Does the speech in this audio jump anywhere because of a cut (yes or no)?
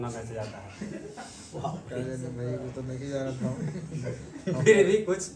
no